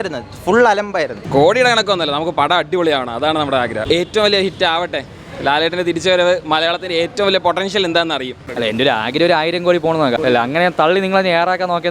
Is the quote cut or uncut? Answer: cut